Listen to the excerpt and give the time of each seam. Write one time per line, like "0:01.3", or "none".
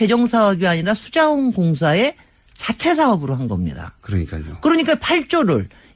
none

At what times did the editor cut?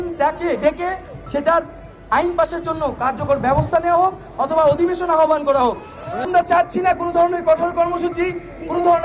0:06.2

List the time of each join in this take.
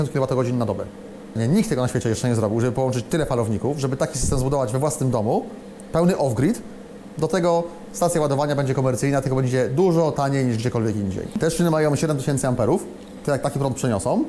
0:01.3
0:11.3

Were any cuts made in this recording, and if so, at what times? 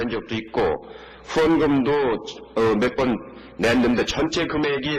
0:01.6

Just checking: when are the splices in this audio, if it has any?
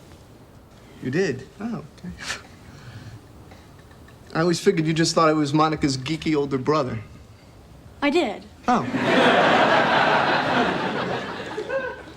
0:07.4

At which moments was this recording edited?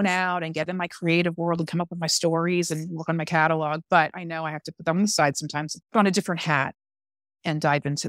0:05.7

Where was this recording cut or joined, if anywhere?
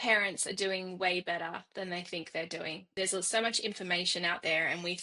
0:02.8

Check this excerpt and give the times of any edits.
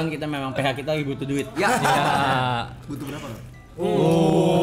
none

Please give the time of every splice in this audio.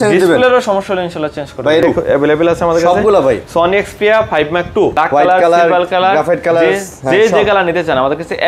0:01.8
0:04.9

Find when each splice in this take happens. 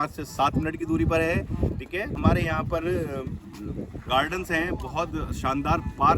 0:02.1

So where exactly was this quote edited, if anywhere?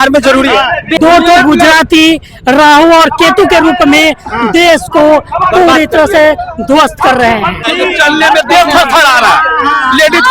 0:00.9
0:07.6

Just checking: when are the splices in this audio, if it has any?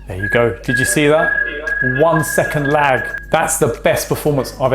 0:03.1

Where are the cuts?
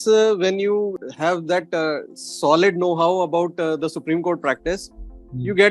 0:01.0

